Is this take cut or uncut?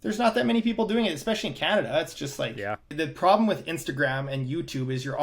cut